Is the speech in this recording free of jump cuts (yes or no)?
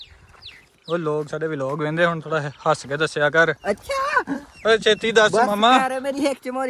yes